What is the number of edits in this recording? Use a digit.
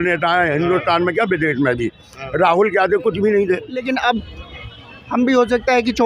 1